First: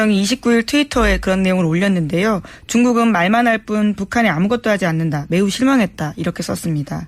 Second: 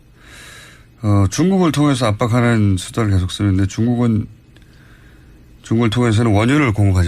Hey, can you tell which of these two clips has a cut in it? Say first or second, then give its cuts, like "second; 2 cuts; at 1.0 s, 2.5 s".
first; 1 cut; at 5.2 s